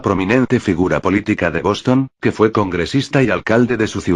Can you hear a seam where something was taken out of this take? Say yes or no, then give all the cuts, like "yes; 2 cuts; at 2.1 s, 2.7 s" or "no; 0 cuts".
yes; 1 cut; at 3.1 s